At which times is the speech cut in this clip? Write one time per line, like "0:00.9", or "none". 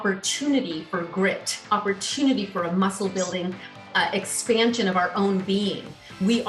none

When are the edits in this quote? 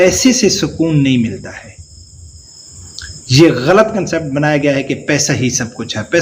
none

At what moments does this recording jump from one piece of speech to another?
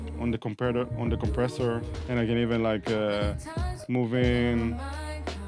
0:01.9

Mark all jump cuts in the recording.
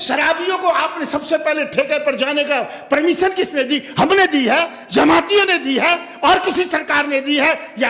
none

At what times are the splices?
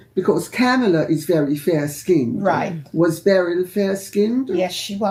none

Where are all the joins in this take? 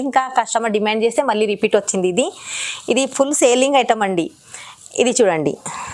none

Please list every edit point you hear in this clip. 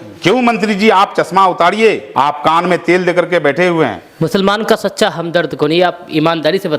0:02.0
0:04.0

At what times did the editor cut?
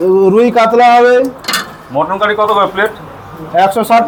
none

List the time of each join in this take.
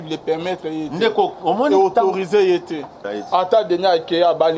0:03.0

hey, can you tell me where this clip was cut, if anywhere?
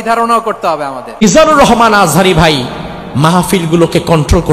0:01.1

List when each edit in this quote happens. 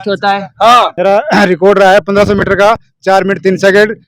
0:00.9

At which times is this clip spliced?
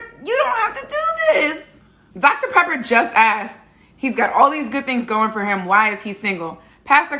none

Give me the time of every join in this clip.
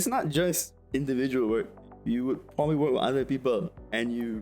0:01.8

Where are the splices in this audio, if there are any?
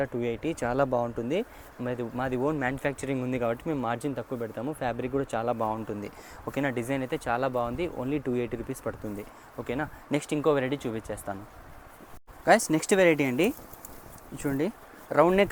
none

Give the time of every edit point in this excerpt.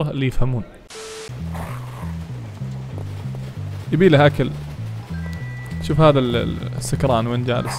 0:01.1

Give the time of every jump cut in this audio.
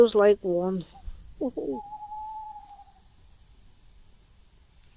none

